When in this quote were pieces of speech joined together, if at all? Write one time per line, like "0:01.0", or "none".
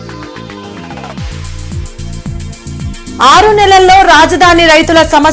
none